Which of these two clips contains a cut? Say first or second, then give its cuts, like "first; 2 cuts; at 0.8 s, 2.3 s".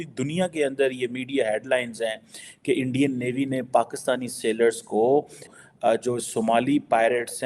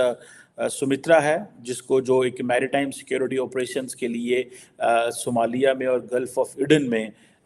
first; 1 cut; at 5.5 s